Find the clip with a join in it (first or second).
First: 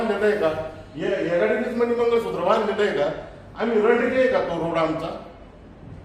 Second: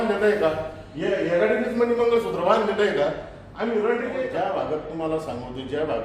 second